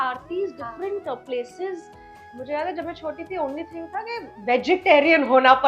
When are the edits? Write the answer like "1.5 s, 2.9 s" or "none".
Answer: 2.3 s